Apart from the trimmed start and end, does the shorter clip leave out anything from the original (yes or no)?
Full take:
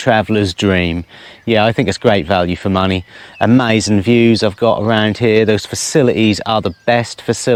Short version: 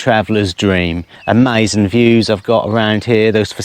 yes